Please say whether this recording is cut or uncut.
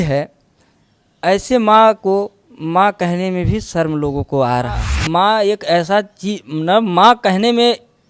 cut